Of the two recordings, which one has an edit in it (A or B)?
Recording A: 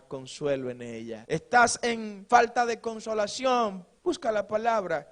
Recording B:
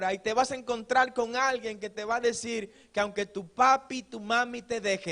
A